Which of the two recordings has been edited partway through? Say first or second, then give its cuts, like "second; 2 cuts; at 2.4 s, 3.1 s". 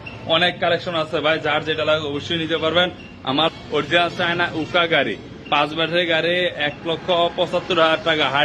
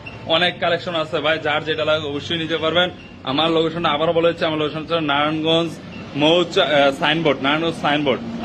first; 1 cut; at 3.5 s